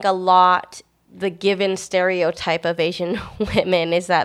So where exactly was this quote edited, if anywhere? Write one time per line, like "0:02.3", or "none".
0:00.9